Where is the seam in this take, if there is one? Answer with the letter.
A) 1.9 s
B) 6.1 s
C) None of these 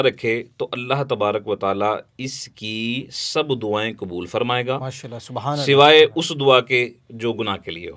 C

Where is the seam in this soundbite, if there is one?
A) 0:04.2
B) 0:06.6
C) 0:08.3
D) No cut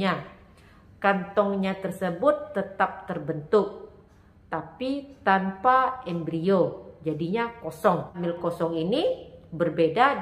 C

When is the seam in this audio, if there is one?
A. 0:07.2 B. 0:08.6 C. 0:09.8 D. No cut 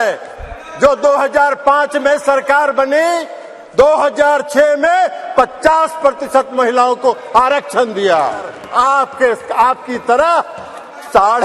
B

